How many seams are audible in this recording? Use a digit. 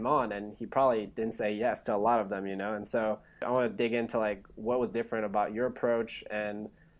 1